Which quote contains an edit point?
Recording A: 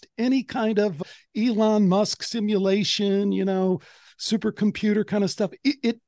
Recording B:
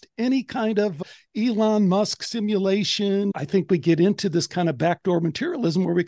B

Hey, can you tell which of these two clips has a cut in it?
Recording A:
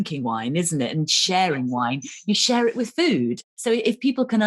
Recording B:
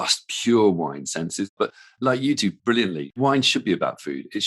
B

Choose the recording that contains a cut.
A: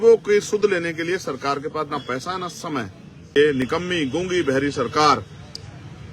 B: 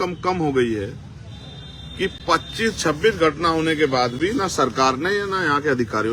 A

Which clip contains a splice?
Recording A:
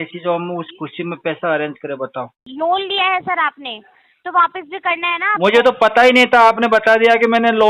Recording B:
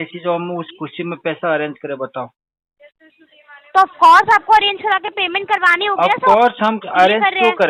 A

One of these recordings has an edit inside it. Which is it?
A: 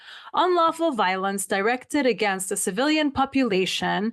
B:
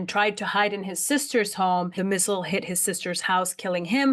B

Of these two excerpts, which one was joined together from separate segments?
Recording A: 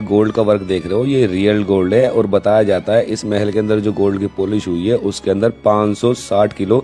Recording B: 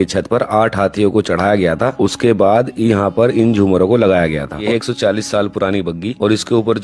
B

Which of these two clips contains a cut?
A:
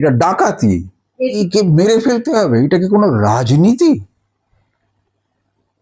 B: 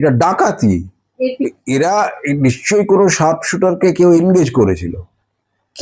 A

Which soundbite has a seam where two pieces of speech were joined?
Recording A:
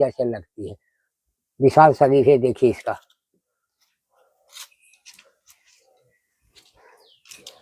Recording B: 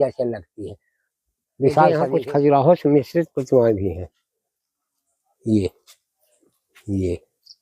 B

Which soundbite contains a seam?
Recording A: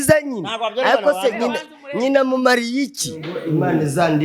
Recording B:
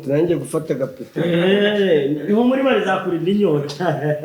A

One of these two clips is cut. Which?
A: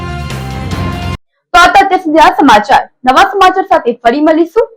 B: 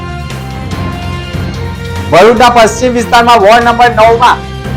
B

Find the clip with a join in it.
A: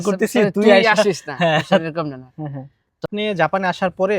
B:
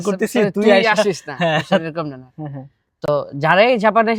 A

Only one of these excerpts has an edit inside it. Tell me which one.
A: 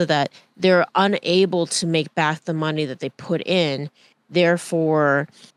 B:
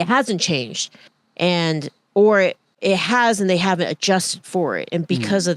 B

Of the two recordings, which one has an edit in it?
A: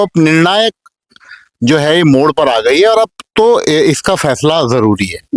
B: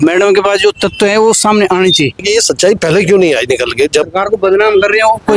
B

